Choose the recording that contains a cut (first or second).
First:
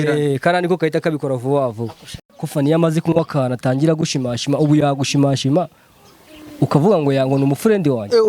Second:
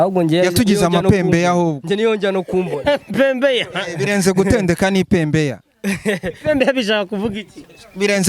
first